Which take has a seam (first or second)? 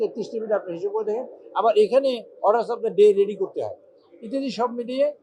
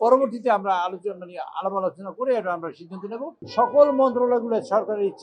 second